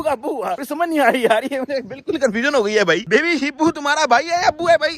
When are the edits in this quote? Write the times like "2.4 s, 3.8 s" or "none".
3.0 s